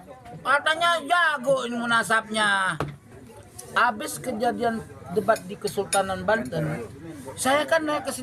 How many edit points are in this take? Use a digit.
0